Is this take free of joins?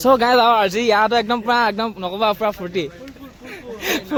yes; 0 cuts

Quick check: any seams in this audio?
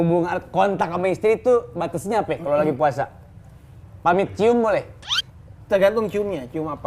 no; 0 cuts

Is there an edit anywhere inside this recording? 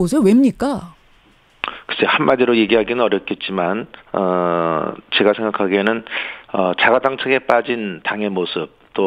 yes; 1 cut; at 7.2 s

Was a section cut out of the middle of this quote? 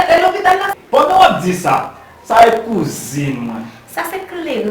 no; 0 cuts

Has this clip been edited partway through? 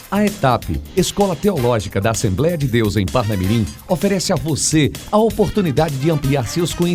no; 0 cuts

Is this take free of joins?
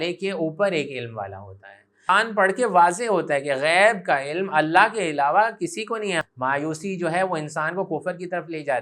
no; 2 cuts; at 2.1 s, 6.2 s

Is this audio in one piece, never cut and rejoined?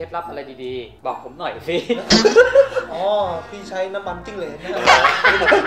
no; 1 cut; at 2.9 s

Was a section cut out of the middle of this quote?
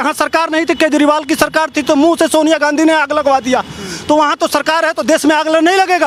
no; 0 cuts

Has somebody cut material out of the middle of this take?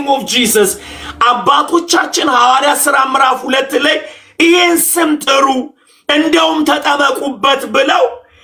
no; 0 cuts

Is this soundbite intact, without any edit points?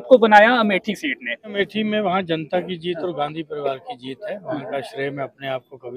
no; 1 cut; at 1.5 s

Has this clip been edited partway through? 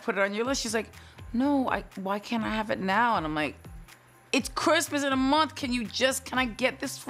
no; 0 cuts

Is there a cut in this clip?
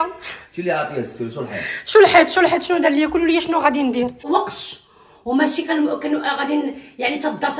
yes; 1 cut; at 4.3 s

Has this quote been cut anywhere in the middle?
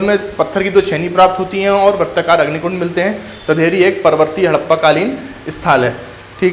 no; 0 cuts

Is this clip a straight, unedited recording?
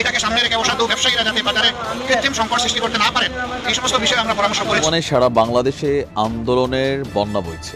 no; 1 cut; at 4.9 s

